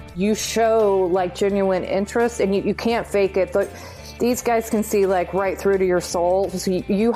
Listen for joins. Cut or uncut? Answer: uncut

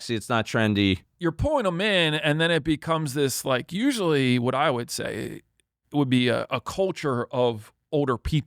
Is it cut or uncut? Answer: cut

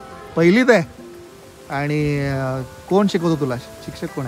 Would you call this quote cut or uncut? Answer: uncut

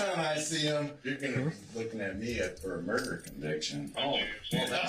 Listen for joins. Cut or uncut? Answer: uncut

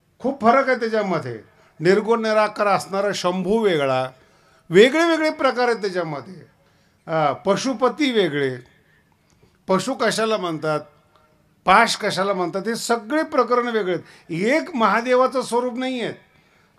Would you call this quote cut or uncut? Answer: uncut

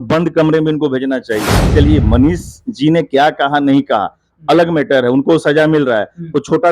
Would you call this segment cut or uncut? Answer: cut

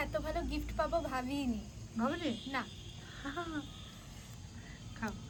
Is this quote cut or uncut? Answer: uncut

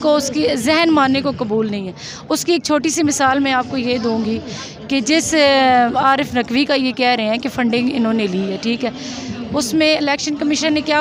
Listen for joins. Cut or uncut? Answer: uncut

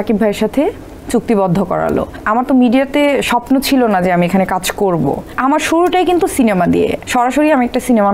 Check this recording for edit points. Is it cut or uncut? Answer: cut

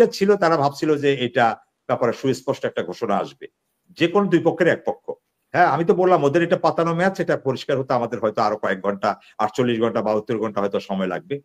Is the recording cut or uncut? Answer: uncut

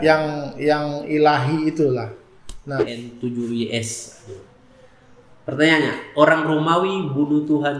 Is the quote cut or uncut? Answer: cut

